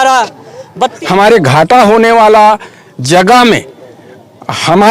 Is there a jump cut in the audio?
yes; 1 cut; at 1.0 s

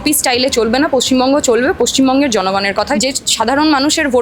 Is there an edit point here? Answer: yes; 1 cut; at 2.9 s

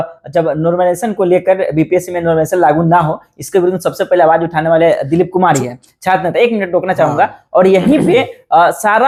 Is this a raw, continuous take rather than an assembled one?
yes; 0 cuts

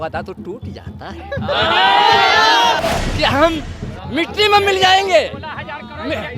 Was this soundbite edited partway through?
yes; 1 cut; at 2.8 s

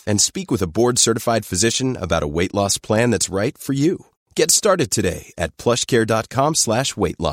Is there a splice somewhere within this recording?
no; 0 cuts

